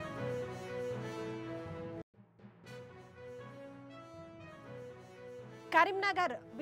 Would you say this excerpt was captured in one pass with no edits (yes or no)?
yes